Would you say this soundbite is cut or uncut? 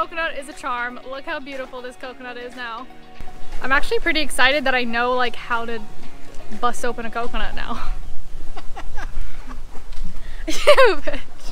uncut